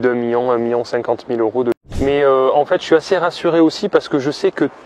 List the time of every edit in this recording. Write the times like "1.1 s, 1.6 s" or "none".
1.8 s